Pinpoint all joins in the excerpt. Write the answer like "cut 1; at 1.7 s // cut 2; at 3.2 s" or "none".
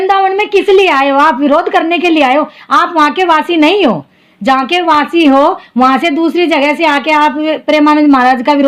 none